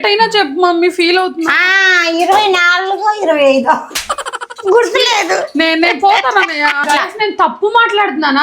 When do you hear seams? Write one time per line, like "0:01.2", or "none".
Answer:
0:06.8